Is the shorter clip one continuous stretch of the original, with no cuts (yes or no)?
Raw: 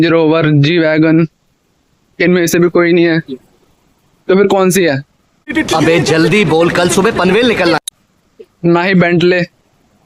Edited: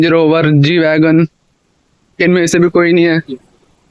yes